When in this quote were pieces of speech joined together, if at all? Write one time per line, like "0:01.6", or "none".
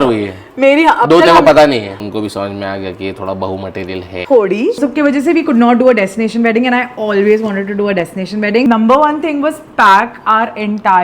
0:01.9
0:04.8
0:08.7